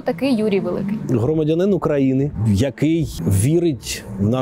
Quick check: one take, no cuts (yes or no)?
no